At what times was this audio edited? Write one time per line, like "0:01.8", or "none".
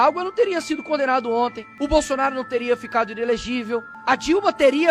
0:01.6
0:03.9